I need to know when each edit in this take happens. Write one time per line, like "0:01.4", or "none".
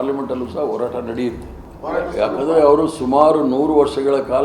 0:01.7